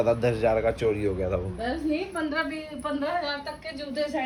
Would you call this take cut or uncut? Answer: uncut